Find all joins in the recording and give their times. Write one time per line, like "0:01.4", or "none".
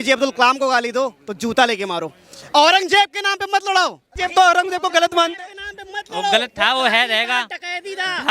0:04.1